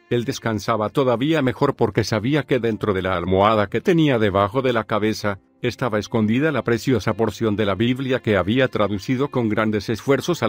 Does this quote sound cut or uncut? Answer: cut